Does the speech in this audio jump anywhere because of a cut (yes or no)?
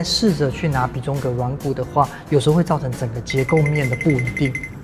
no